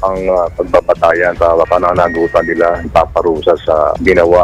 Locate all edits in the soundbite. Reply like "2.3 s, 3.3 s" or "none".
1.4 s, 2.9 s